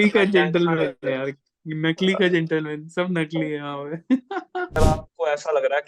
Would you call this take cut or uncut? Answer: cut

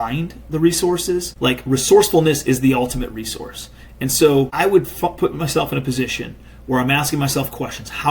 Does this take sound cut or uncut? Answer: cut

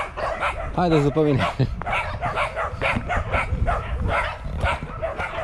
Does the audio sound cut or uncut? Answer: uncut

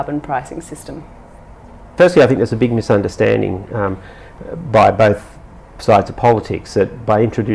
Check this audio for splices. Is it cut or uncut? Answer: cut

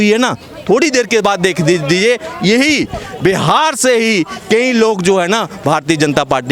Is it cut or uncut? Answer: uncut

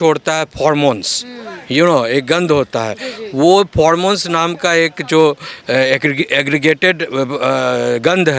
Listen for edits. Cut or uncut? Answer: uncut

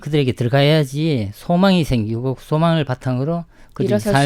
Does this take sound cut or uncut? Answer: uncut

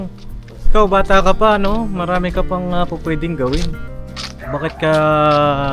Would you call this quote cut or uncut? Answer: uncut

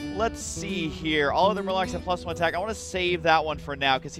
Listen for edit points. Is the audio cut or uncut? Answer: uncut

